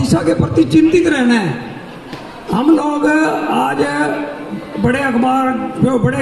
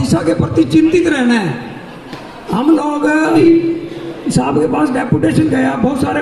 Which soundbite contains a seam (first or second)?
second